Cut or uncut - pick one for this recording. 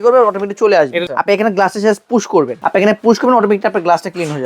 cut